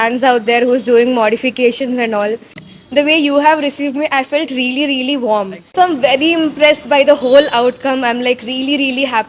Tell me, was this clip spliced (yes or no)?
yes